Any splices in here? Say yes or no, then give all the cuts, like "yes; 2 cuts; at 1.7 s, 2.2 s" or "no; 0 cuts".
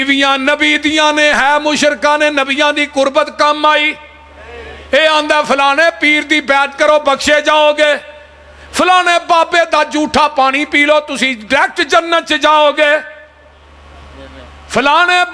no; 0 cuts